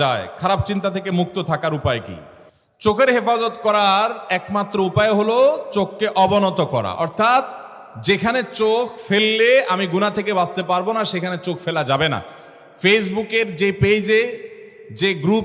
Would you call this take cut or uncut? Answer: uncut